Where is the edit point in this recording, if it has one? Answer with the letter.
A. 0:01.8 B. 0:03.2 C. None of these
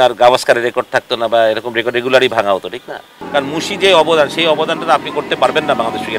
B